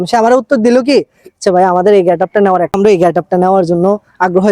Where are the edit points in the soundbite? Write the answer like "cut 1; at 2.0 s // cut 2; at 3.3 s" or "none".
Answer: cut 1; at 2.7 s

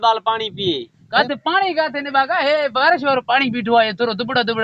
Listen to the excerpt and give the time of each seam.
cut 1; at 0.9 s

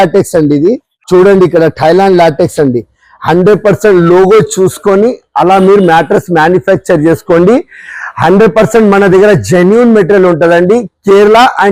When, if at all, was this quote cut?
none

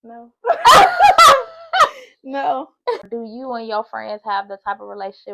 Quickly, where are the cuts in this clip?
cut 1; at 3.1 s

